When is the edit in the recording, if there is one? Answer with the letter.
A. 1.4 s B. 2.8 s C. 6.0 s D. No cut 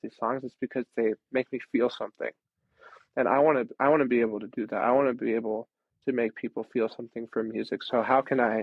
D